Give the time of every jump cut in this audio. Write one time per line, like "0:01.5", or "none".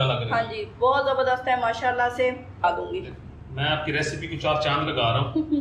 0:02.6